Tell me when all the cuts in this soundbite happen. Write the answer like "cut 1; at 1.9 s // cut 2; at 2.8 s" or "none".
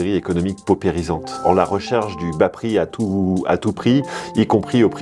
cut 1; at 1.3 s